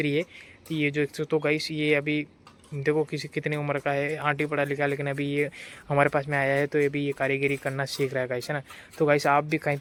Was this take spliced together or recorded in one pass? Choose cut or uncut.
uncut